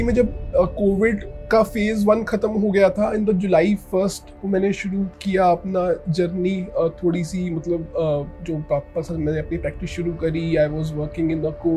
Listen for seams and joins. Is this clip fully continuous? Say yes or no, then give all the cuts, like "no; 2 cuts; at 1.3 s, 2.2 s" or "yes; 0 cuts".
yes; 0 cuts